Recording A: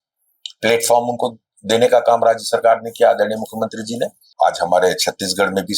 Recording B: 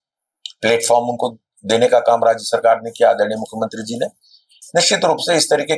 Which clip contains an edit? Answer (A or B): A